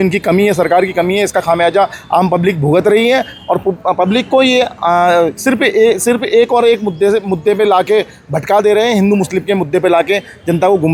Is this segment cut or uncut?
uncut